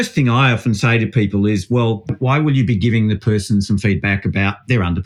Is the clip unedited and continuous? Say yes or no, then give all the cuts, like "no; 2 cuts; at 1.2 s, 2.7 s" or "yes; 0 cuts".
no; 1 cut; at 2.2 s